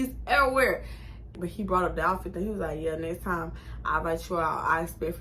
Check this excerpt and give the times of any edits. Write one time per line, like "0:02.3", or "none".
0:01.3